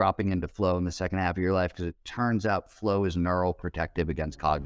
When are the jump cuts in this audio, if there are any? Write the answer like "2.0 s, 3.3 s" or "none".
none